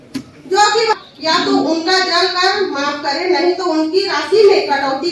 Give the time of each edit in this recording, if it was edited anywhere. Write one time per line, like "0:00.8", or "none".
0:00.9